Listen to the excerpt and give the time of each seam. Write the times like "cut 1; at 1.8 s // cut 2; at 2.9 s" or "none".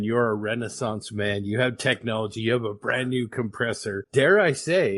none